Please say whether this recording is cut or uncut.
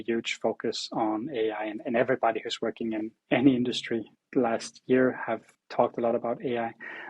cut